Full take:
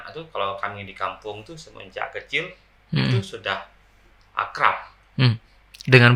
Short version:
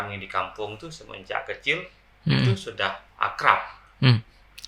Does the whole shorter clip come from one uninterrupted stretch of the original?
no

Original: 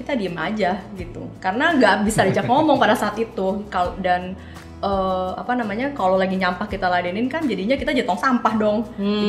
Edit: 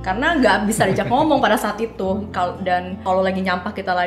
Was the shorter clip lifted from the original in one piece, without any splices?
no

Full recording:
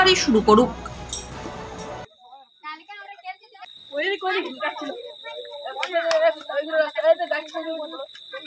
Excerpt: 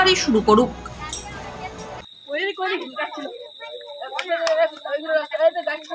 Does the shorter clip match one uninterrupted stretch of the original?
no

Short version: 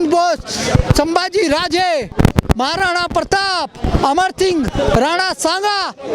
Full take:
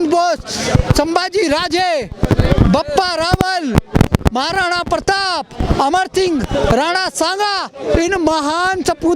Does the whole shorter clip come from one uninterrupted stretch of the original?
no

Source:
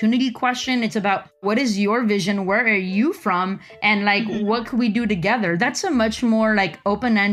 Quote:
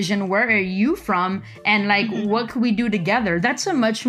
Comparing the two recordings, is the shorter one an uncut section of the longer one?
yes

